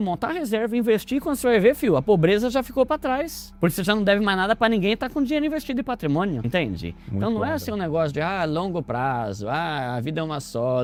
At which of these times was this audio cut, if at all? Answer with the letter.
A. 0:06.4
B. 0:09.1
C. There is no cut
C